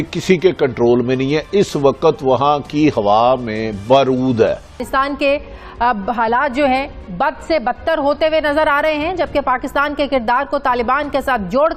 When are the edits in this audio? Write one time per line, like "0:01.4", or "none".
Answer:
0:04.8

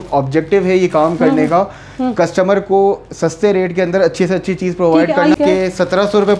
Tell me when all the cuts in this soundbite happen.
0:05.4

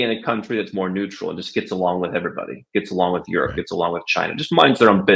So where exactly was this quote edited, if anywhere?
none

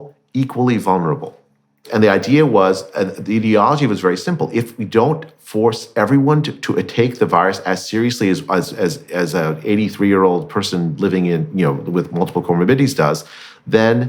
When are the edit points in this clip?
0:01.9

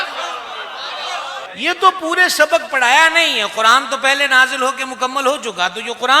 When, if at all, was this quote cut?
0:01.5

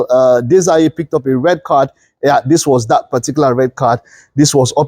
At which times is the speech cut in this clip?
none

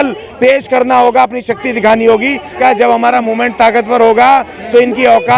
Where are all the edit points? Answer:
0:02.6

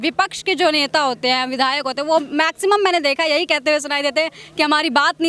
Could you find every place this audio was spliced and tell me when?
none

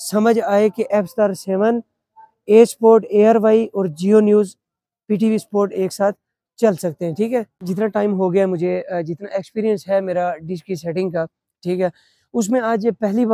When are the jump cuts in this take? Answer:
0:07.5

